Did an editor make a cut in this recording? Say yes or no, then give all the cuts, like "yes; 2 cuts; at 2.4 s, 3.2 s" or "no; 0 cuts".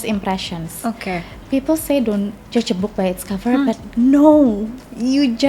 no; 0 cuts